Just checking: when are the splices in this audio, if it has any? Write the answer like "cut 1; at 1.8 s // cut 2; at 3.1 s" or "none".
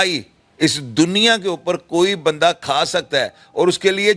none